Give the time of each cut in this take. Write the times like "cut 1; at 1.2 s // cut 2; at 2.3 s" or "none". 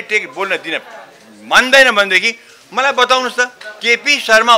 none